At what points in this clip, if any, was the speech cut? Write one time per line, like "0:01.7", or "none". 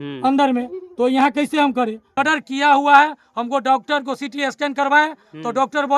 0:02.1